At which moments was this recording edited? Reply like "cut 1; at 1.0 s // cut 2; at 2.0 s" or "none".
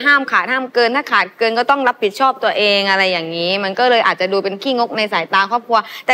none